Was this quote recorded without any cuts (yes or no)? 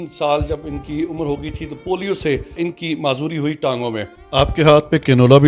no